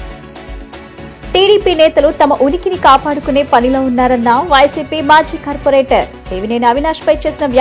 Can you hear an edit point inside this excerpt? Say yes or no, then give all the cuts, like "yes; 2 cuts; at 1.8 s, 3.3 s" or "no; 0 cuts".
yes; 1 cut; at 1.0 s